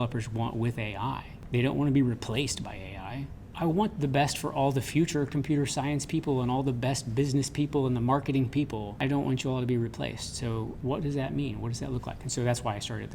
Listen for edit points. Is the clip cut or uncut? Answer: cut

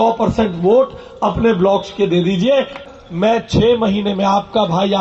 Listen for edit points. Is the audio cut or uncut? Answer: cut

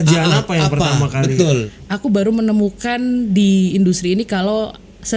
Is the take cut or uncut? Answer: cut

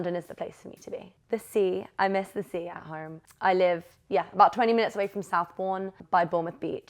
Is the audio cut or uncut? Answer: cut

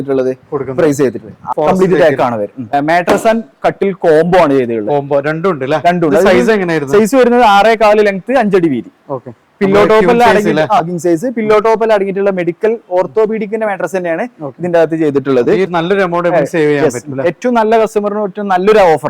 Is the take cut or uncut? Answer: cut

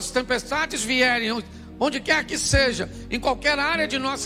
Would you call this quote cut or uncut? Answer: uncut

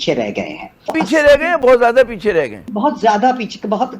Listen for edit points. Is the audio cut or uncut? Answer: cut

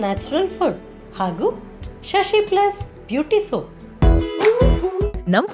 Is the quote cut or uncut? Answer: cut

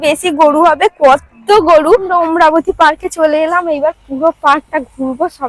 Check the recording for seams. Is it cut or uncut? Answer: cut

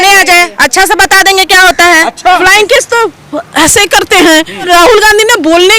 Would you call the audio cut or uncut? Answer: cut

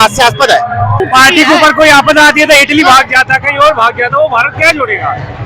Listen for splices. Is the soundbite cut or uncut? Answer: cut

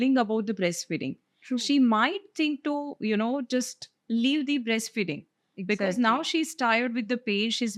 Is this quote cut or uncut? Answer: uncut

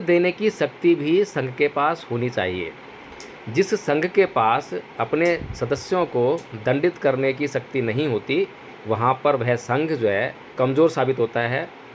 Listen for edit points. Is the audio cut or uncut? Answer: cut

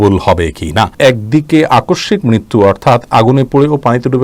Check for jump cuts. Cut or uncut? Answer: cut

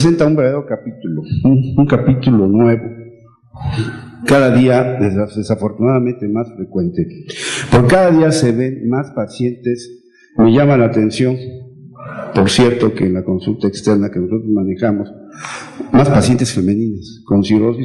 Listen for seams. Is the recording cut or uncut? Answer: cut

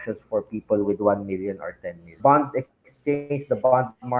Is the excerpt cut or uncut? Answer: cut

